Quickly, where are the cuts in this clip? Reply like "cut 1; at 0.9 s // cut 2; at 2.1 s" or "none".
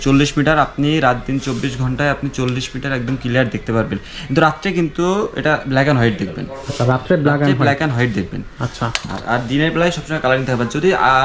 none